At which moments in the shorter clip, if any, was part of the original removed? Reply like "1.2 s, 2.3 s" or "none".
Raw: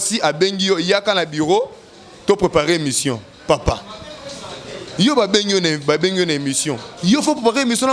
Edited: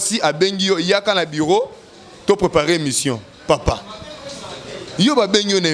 none

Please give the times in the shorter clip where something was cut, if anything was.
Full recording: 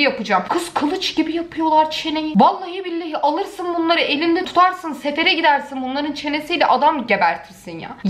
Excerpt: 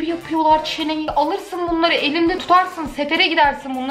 1.0 s

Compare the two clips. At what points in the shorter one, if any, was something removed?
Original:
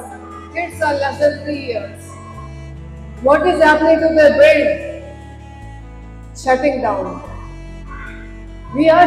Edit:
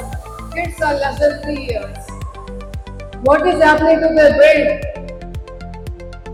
none

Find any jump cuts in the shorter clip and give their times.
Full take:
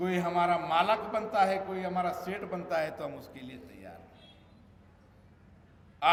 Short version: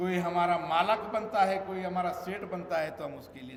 none

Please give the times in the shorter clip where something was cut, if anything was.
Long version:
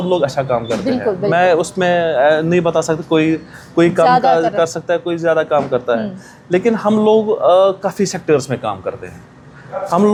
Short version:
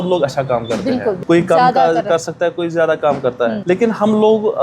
1.2 s, 3.6 s

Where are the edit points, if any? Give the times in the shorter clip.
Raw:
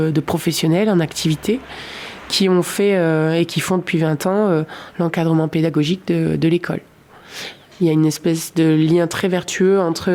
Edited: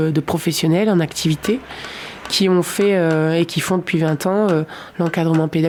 none

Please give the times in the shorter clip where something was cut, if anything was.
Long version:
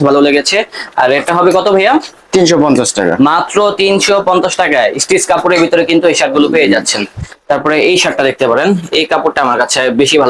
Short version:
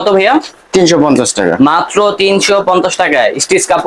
none

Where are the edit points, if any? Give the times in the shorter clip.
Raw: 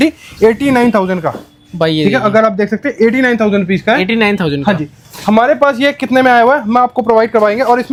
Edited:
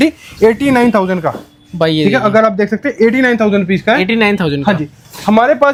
none

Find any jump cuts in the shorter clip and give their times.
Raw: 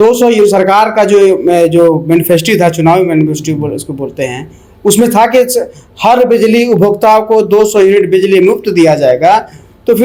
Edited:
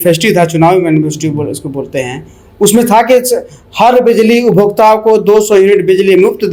none

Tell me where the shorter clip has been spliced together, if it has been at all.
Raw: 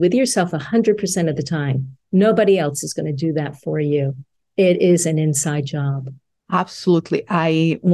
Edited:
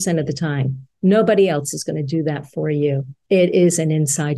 3.1 s

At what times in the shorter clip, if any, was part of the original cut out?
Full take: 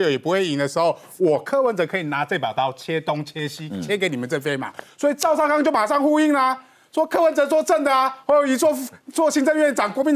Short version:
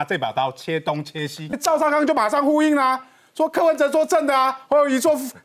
1.6 s

